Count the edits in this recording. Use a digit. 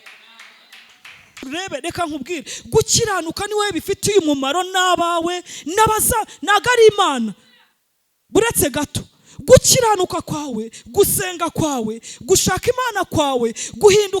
1